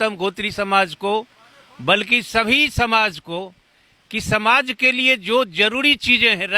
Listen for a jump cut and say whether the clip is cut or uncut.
uncut